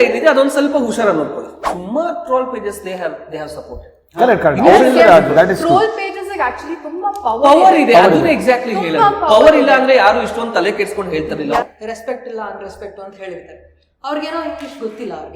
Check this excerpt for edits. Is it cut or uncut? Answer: cut